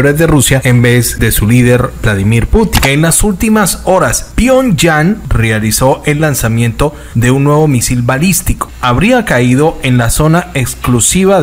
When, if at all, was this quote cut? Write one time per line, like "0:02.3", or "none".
0:00.9
0:02.7
0:04.2
0:05.3
0:08.7